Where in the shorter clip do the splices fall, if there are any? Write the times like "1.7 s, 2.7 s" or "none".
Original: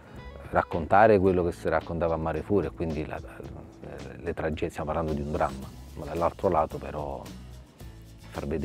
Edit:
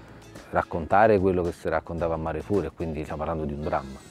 3.1 s